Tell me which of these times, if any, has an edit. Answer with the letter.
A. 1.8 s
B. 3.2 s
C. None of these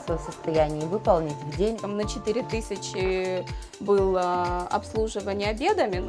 A